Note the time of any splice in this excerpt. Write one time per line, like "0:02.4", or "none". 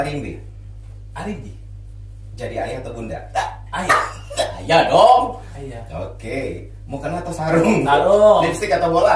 none